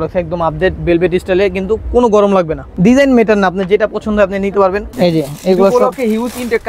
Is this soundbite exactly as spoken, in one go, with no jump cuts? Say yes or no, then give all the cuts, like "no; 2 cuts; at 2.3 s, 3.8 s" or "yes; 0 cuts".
no; 2 cuts; at 2.6 s, 4.9 s